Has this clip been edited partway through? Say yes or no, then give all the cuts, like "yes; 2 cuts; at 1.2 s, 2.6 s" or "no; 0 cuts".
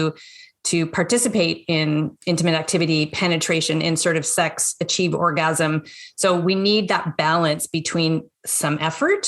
yes; 1 cut; at 2.1 s